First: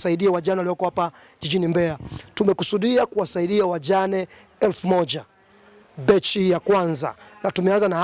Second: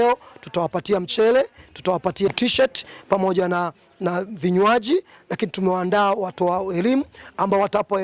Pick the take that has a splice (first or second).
second